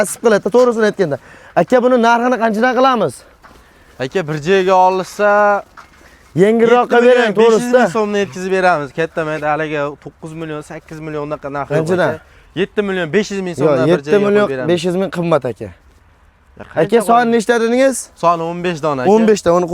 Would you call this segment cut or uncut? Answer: uncut